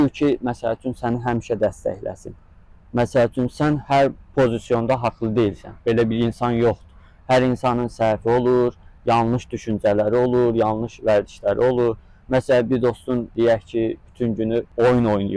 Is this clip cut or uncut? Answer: uncut